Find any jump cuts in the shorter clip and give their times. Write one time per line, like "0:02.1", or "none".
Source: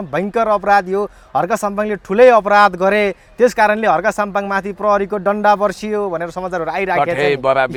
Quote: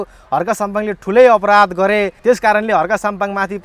0:02.1